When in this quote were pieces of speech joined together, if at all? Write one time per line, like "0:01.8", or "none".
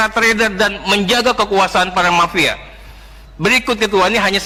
none